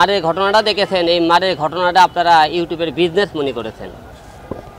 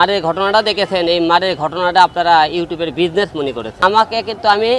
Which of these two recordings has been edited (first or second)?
second